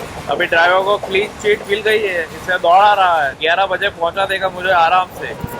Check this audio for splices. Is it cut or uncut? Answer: cut